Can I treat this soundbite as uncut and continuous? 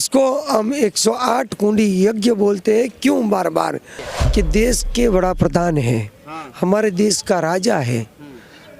no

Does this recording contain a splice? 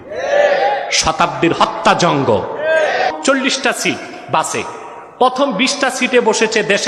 yes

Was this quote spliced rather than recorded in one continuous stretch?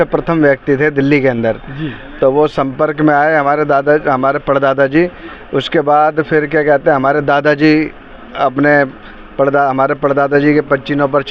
no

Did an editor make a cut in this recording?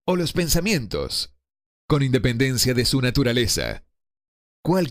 yes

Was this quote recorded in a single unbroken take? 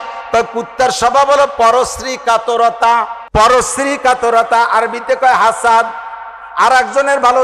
no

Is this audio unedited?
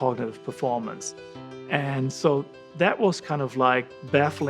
yes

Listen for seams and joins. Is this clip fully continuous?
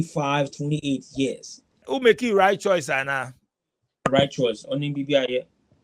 no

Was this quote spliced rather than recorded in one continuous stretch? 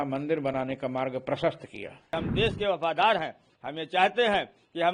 yes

